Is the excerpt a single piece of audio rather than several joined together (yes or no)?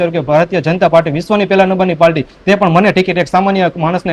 yes